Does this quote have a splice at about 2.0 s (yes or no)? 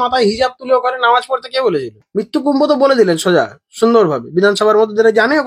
yes